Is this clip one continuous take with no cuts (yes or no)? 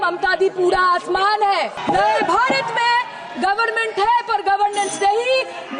no